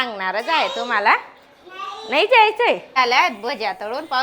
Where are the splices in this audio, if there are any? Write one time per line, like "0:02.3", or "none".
0:03.0